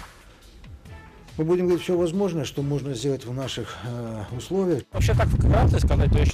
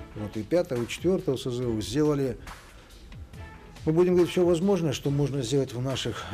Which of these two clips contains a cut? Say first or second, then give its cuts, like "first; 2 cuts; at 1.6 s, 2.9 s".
first; 1 cut; at 4.9 s